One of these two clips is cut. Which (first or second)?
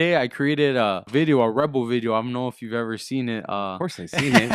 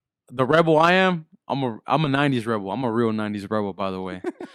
first